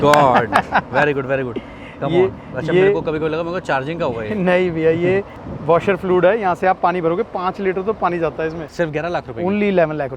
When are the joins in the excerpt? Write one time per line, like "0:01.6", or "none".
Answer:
0:08.6